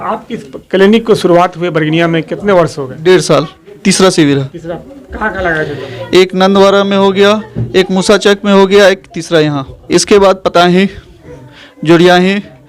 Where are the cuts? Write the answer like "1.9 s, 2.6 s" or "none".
3.7 s, 9.7 s